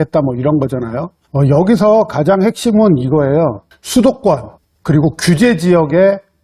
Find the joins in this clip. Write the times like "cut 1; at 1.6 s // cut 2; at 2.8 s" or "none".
cut 1; at 1.2 s